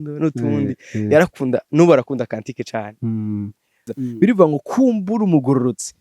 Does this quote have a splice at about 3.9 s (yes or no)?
yes